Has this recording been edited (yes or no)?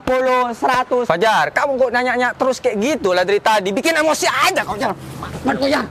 yes